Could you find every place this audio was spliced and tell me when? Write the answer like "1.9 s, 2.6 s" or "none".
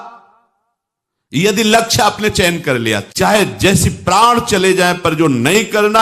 3.1 s